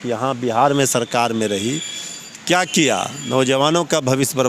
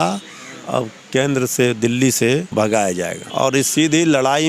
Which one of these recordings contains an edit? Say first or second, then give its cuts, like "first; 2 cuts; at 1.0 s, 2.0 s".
second; 2 cuts; at 2.5 s, 3.2 s